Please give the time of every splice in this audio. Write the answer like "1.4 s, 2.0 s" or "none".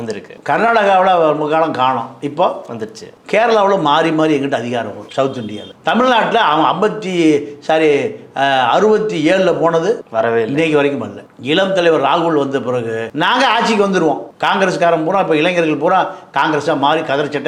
none